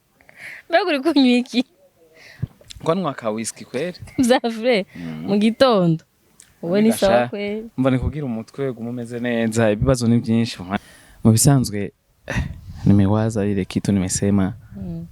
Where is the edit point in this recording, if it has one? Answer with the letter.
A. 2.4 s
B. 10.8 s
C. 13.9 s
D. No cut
B